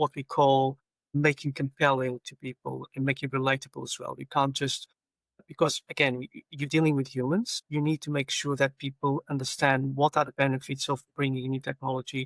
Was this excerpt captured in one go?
yes; 0 cuts

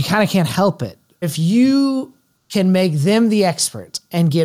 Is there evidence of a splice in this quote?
yes; 1 cut; at 1.2 s

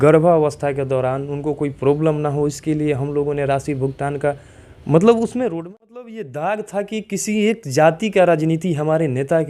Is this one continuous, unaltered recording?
no; 1 cut; at 5.6 s

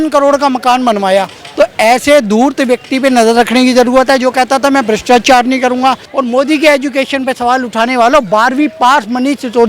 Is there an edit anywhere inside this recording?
yes; 1 cut; at 6.1 s

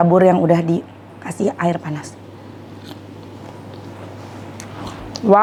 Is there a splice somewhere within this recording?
no; 0 cuts

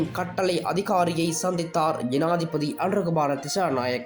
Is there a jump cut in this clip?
no; 0 cuts

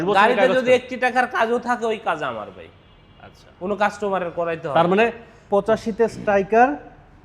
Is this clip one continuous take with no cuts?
yes; 0 cuts

